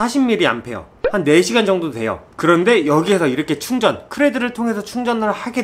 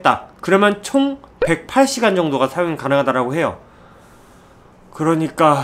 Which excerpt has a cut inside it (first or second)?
first